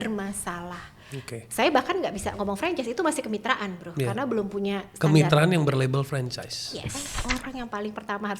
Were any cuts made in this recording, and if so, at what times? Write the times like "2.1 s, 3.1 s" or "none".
7.1 s